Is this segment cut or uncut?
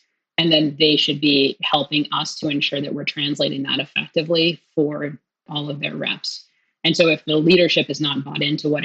cut